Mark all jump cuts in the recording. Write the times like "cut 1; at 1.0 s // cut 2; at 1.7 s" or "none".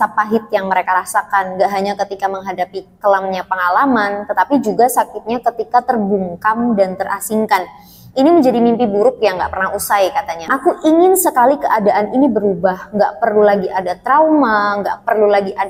cut 1; at 10.5 s